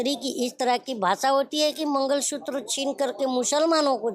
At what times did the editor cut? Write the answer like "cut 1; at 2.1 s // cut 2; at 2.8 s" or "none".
none